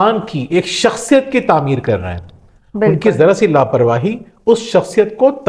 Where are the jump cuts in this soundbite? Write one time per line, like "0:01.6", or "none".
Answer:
none